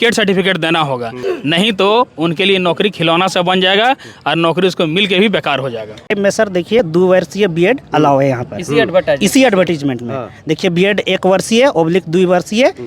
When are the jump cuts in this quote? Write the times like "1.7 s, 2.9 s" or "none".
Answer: 1.2 s, 6.0 s